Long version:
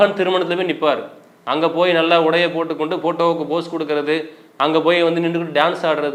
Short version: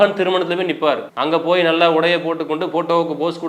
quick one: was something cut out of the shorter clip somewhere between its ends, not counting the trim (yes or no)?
yes